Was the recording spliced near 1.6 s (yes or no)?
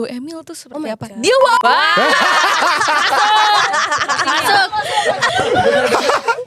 yes